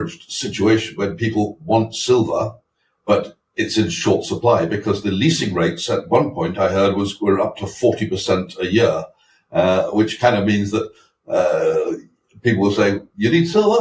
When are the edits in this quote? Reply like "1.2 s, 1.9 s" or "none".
none